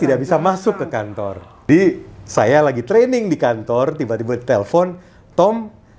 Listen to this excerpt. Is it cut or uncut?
cut